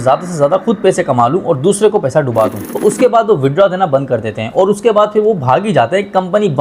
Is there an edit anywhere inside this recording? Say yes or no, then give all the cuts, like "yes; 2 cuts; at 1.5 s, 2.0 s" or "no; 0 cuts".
yes; 1 cut; at 2.7 s